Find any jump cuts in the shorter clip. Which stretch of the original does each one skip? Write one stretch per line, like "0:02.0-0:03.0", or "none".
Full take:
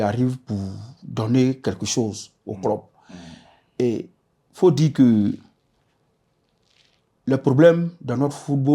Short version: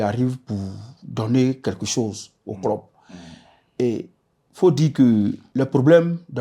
0:05.4-0:07.1

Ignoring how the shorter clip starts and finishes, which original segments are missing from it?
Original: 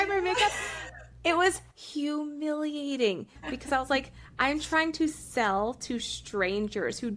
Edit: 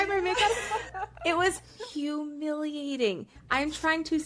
0:03.3-0:04.2

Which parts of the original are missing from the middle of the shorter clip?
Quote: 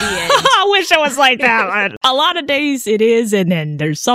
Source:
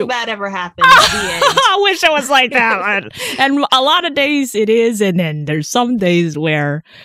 0:03.1-0:03.7

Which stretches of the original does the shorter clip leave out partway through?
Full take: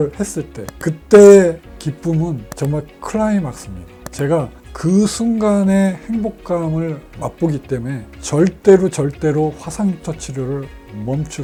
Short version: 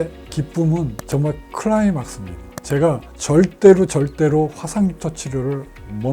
0:04.6-0:08.1

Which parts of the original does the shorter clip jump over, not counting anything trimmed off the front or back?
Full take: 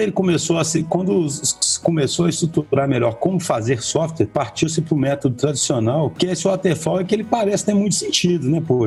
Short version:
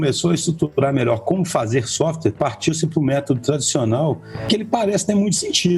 0:06.3-0:06.9

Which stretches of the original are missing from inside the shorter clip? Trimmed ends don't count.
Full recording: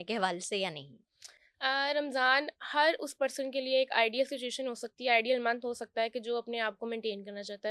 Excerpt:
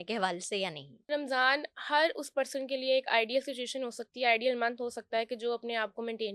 0:01.1-0:01.9

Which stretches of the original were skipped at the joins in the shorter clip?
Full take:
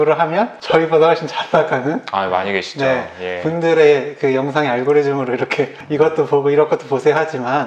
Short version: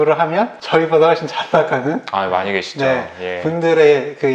none

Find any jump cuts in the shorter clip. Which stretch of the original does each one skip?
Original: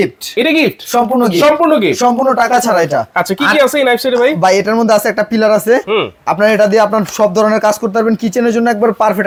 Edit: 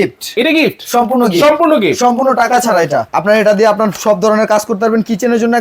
0:03.1-0:06.2

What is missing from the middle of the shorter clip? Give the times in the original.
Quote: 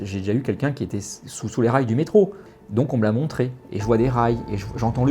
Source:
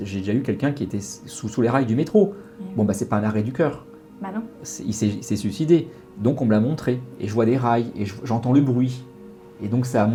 0:02.5-0:06.0

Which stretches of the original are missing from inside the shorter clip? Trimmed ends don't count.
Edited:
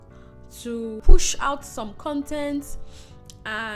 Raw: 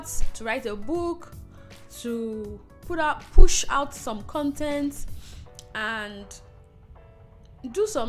0:02.4-0:03.3

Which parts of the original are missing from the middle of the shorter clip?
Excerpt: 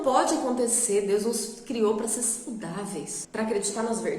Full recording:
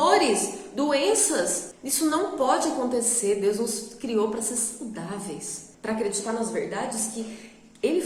0:05.5-0:05.7

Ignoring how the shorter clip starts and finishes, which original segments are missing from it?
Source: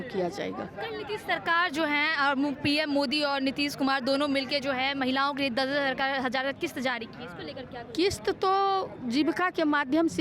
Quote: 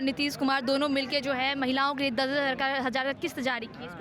none

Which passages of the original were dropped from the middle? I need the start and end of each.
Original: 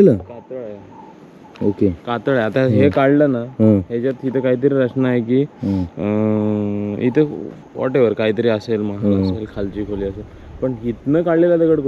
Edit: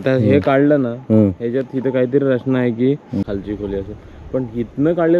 0:05.7-0:09.5

